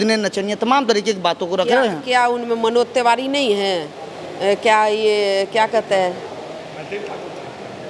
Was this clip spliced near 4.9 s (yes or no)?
no